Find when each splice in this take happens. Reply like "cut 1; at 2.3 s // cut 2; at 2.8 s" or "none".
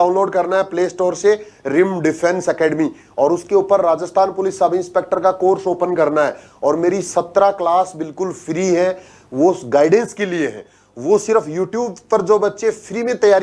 none